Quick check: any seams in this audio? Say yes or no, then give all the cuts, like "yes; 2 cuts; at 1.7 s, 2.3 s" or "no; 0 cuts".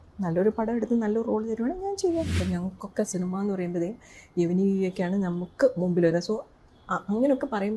yes; 1 cut; at 2.4 s